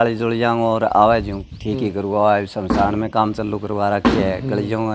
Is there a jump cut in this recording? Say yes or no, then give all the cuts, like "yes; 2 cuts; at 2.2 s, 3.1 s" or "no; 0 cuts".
no; 0 cuts